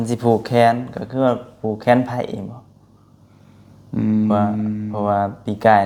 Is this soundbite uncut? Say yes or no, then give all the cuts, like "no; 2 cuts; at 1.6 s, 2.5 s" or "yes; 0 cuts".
yes; 0 cuts